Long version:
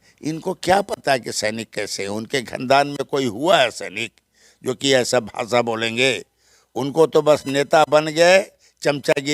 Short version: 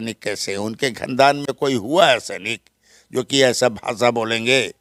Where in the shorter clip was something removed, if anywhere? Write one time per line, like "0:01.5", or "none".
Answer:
none

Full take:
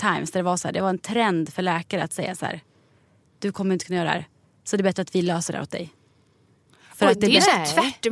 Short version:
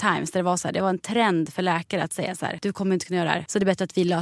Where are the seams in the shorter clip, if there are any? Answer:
0:02.6
0:03.4

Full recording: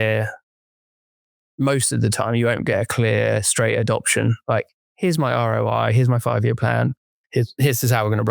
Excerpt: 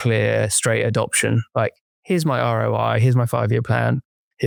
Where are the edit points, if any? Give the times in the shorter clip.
none

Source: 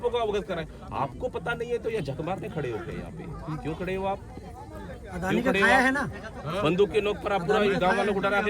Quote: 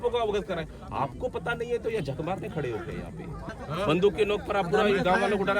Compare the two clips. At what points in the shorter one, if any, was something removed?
0:03.5

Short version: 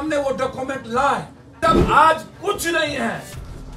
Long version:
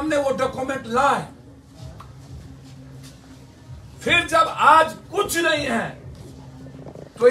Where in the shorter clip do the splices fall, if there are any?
0:01.5

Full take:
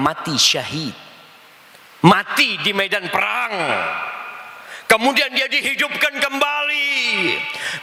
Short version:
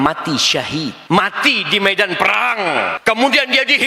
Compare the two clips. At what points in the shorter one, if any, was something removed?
0:01.0
0:03.0

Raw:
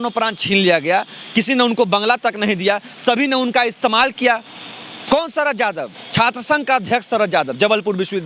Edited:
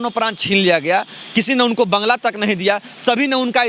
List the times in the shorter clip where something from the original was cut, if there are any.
none

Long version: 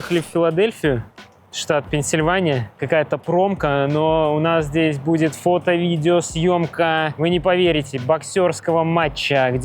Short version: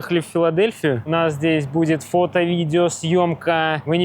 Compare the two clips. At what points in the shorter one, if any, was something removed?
0:01.1

